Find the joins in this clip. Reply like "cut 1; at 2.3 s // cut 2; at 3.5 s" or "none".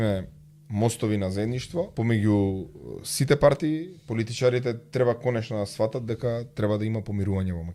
cut 1; at 1.9 s